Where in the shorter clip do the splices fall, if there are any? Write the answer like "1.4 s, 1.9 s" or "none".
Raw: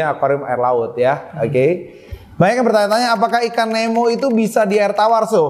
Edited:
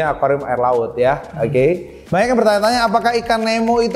1.9 s